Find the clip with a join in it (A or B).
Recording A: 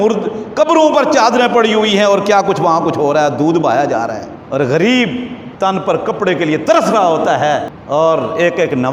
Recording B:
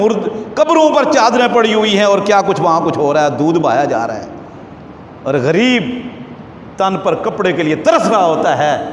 A